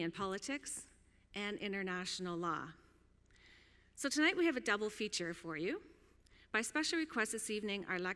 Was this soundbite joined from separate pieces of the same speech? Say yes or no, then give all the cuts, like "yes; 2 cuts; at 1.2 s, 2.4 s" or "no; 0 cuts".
no; 0 cuts